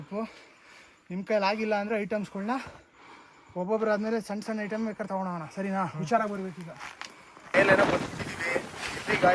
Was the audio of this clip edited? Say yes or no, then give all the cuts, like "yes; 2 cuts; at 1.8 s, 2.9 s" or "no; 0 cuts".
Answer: yes; 1 cut; at 7.5 s